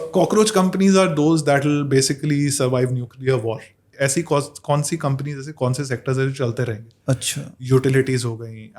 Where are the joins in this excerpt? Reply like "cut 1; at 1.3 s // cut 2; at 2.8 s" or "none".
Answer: cut 1; at 3.9 s